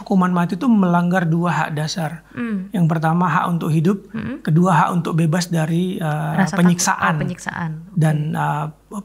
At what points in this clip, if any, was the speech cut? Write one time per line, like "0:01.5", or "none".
none